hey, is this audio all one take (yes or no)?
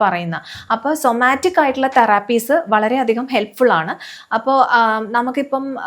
yes